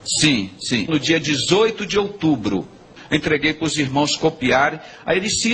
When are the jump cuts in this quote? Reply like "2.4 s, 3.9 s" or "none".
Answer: 3.0 s

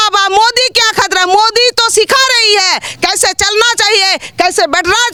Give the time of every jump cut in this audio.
none

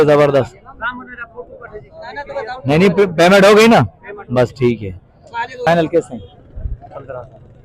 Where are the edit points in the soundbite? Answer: 5.6 s

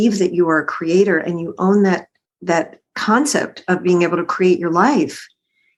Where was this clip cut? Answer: none

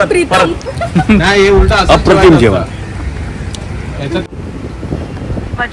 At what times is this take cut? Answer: 4.2 s

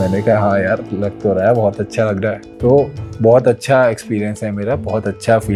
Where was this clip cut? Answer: none

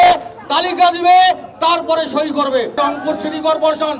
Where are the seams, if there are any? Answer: 2.8 s

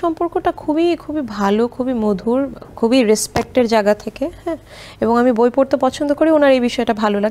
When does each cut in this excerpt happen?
none

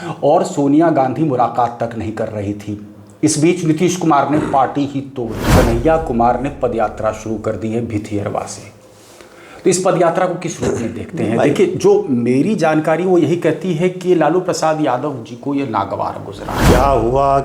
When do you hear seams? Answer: 5.5 s, 16.5 s

